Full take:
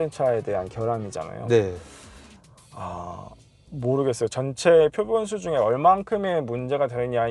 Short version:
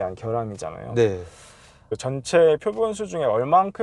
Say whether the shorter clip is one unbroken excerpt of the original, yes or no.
no